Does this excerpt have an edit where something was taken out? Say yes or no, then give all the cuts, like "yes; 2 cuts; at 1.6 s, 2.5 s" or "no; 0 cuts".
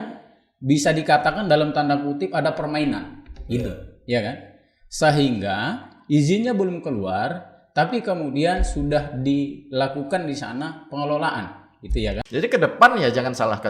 yes; 1 cut; at 12.2 s